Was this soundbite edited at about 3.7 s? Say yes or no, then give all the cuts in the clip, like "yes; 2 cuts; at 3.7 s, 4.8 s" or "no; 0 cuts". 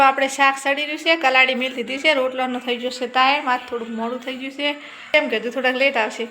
no; 1 cut; at 5.1 s